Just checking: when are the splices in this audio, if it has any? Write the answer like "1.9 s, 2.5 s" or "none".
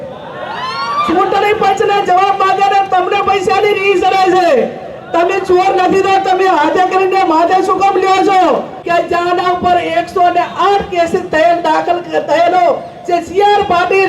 8.7 s